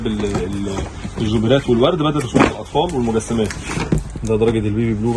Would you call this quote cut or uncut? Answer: cut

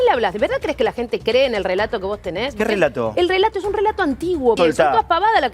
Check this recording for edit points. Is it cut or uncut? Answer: cut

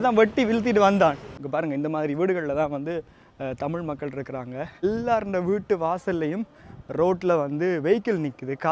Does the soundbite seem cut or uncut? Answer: cut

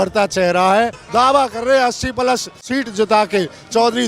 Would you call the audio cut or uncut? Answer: cut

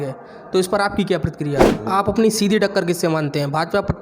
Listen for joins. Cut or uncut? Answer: cut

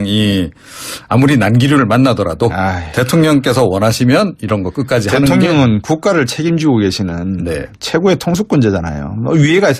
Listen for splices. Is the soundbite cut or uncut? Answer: cut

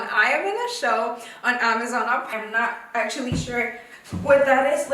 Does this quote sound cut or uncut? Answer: cut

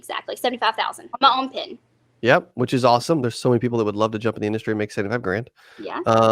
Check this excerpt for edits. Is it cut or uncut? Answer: cut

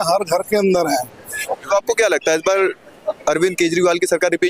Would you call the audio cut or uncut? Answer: cut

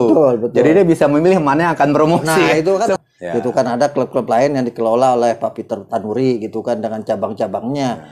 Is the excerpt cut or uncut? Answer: cut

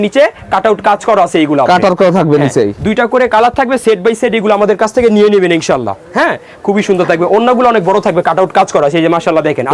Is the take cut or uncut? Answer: uncut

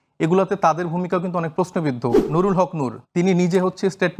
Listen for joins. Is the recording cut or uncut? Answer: cut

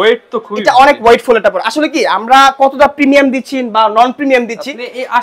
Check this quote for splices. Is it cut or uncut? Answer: uncut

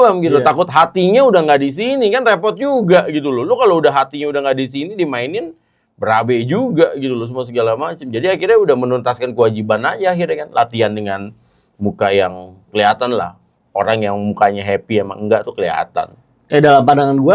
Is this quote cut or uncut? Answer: uncut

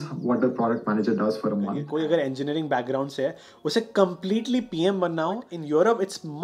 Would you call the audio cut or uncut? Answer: cut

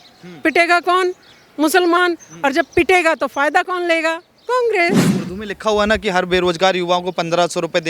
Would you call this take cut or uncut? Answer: cut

